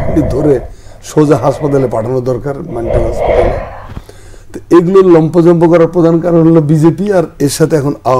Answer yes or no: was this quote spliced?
no